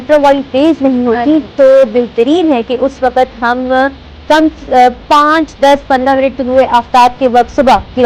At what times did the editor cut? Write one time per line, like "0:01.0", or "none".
none